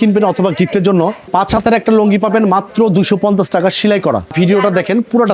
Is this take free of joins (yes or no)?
no